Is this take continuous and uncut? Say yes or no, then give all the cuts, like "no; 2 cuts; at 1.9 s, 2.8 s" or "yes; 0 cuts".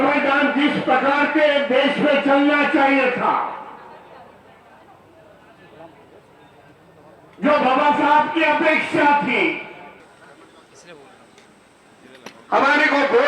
no; 1 cut; at 10.0 s